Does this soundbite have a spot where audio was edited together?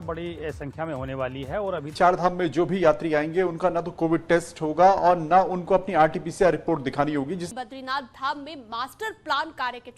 yes; 2 cuts; at 1.9 s, 7.5 s

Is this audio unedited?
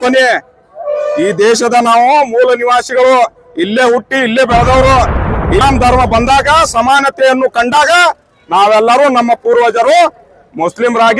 no; 1 cut; at 5.6 s

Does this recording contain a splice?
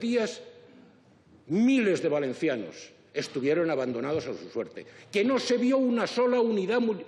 no; 0 cuts

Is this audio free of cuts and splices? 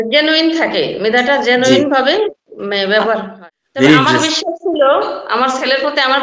no; 1 cut; at 3.3 s

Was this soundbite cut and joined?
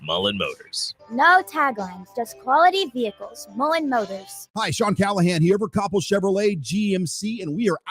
yes; 1 cut; at 4.5 s

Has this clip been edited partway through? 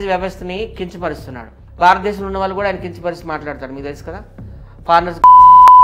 yes; 1 cut; at 1.6 s

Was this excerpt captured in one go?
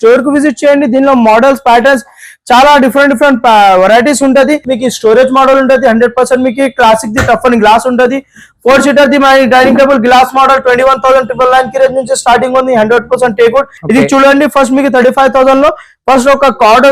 no; 2 cuts; at 4.7 s, 13.8 s

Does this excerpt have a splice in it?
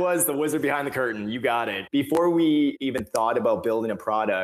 yes; 2 cuts; at 1.8 s, 2.8 s

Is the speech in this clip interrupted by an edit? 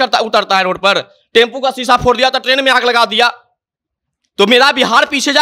no; 0 cuts

